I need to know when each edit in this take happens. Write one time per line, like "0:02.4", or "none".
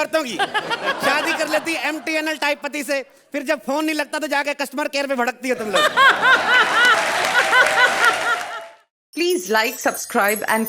0:08.4